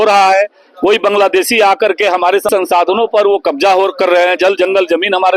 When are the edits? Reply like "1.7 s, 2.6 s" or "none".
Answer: 2.5 s